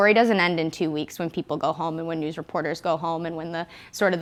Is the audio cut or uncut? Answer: uncut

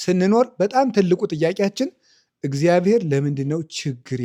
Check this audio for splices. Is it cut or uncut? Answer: uncut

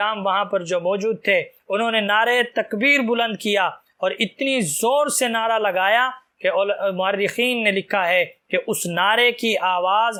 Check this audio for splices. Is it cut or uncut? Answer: uncut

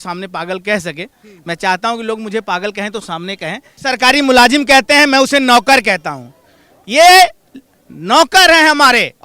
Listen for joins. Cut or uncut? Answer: cut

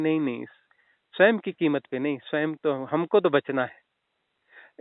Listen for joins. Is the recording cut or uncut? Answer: uncut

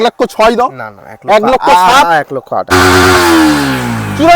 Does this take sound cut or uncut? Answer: cut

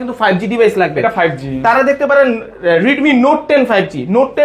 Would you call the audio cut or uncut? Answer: uncut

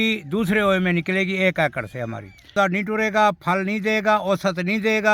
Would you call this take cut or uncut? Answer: cut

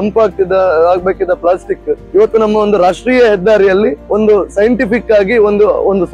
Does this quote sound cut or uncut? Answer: uncut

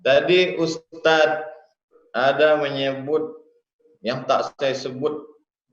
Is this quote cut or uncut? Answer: cut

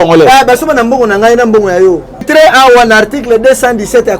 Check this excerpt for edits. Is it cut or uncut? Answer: cut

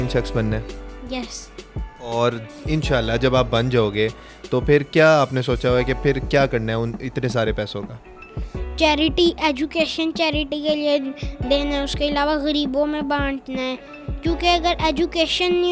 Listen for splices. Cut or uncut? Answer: uncut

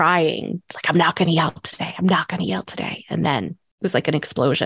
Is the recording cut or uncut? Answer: cut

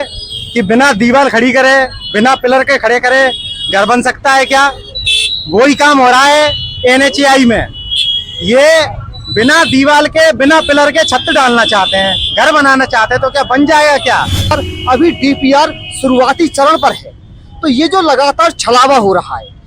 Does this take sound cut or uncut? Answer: cut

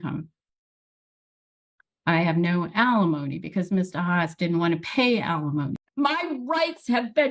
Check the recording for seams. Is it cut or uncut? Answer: cut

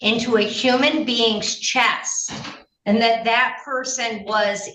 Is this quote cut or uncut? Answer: uncut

